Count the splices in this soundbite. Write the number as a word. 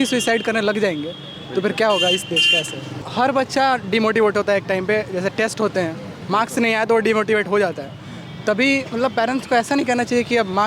one